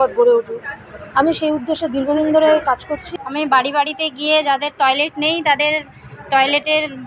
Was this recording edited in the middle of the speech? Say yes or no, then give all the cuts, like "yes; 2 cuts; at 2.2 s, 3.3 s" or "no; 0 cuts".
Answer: yes; 1 cut; at 3.1 s